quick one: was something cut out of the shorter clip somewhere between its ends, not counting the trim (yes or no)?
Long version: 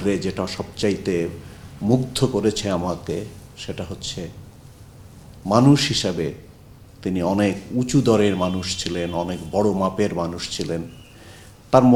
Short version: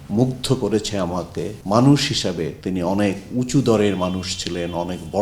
yes